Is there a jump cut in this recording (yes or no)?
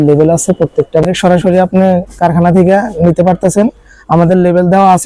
yes